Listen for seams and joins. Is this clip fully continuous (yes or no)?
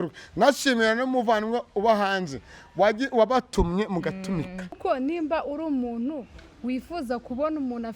no